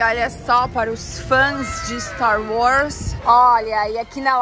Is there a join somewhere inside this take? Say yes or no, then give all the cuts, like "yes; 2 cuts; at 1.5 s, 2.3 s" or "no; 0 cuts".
yes; 1 cut; at 3.2 s